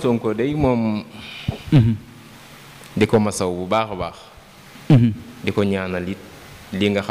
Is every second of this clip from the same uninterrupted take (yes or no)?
yes